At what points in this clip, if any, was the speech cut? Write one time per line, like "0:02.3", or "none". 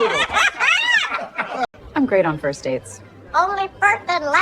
0:01.8

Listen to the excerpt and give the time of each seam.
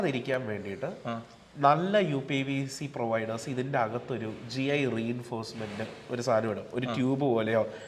none

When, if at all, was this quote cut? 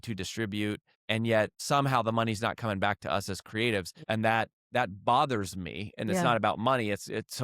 0:00.9
0:01.6
0:03.9
0:04.6

